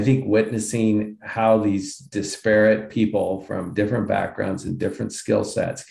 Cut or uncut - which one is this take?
uncut